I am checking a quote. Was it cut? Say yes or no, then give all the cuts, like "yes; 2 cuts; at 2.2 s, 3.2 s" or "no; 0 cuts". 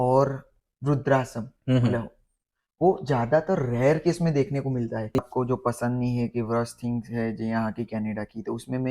yes; 1 cut; at 5.3 s